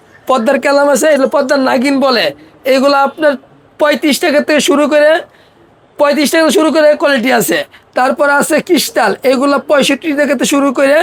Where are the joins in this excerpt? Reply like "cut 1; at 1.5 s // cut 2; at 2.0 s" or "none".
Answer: none